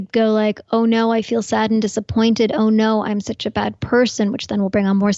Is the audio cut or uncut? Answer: uncut